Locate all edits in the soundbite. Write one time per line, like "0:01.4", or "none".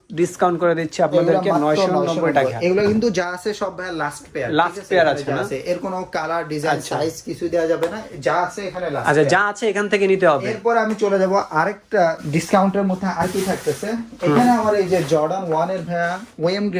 none